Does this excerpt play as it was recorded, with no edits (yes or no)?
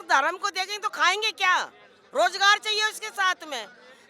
yes